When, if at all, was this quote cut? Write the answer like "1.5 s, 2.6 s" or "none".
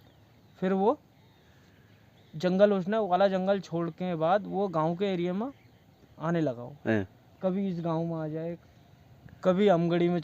8.6 s

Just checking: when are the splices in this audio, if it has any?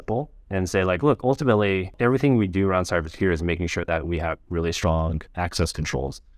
2.0 s

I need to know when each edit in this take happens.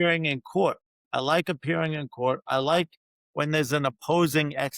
0.9 s

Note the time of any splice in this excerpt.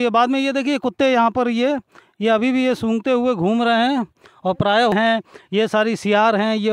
4.9 s

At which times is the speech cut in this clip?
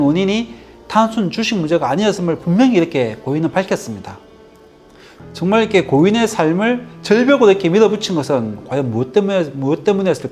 5.1 s

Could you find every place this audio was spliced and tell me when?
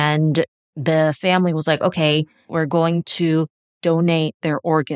none

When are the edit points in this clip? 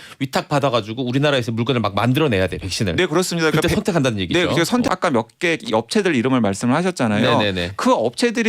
4.8 s

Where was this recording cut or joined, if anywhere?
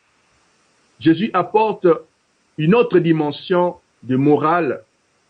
none

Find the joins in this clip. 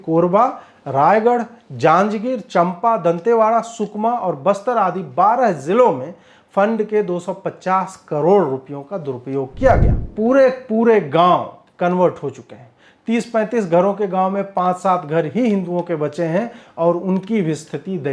10.1 s

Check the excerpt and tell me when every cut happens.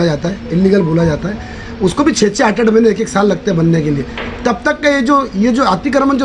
none

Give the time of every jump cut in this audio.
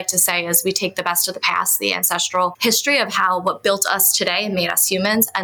2.6 s

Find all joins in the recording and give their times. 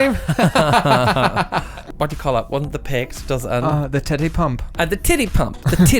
1.8 s

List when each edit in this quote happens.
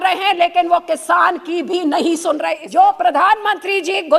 2.6 s

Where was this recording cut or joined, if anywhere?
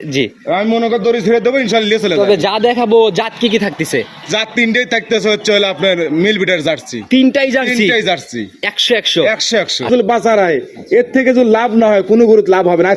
9.9 s

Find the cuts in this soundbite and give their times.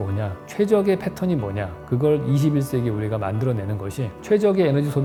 none

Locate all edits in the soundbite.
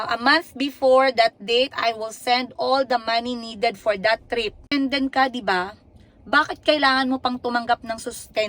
4.7 s

